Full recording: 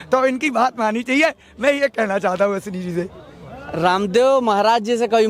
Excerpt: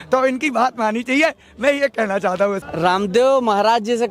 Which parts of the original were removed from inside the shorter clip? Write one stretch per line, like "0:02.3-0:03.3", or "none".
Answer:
0:02.7-0:03.7